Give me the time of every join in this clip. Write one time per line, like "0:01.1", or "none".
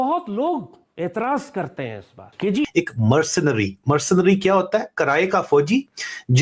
0:02.7